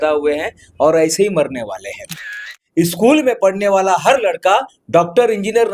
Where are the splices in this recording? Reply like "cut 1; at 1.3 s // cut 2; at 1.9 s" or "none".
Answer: cut 1; at 2.5 s